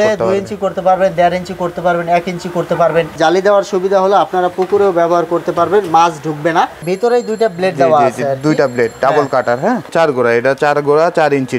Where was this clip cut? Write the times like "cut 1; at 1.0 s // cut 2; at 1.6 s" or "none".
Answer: cut 1; at 3.1 s // cut 2; at 6.8 s // cut 3; at 9.9 s